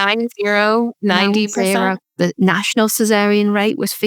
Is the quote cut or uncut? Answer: cut